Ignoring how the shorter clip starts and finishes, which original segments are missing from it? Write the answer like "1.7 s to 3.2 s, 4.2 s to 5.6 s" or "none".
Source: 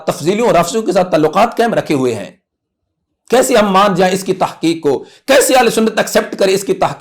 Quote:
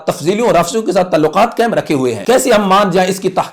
2.2 s to 3.2 s